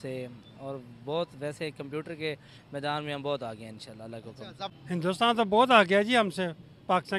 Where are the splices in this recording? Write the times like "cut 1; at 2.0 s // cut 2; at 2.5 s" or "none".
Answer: cut 1; at 4.6 s